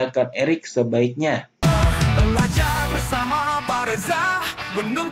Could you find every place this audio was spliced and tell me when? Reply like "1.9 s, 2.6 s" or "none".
1.5 s